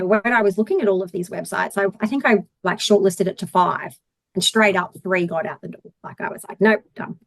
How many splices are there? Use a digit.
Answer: 1